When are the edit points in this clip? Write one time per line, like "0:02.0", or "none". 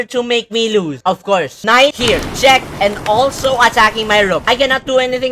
0:01.5